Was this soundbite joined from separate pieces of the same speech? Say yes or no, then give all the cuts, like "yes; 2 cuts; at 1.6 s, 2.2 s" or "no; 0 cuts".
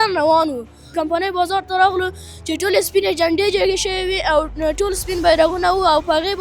yes; 1 cut; at 0.9 s